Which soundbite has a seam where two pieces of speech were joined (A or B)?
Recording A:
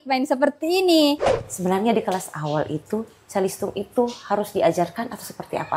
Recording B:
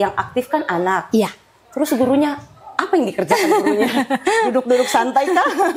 A